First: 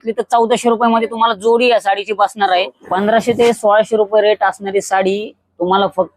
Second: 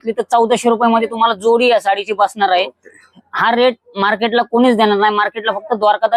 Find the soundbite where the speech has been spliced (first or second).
first